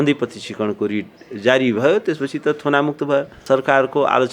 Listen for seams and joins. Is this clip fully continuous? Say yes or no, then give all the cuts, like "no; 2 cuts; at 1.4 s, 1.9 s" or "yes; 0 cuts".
no; 1 cut; at 3.4 s